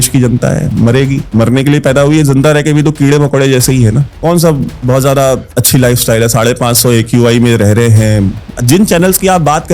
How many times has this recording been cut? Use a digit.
1